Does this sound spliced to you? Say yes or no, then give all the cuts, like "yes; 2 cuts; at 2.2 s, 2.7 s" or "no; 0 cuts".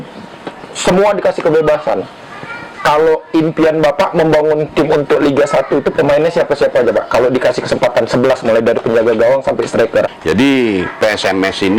yes; 1 cut; at 10.1 s